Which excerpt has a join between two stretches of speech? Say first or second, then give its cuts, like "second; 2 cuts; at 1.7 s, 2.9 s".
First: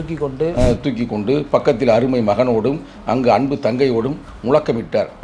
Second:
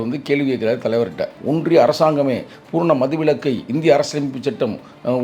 second; 1 cut; at 1.3 s